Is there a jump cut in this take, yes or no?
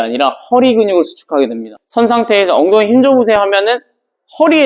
yes